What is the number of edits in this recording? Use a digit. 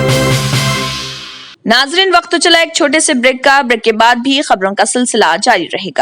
1